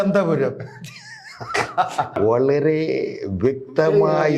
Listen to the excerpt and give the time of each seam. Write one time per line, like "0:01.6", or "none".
0:02.2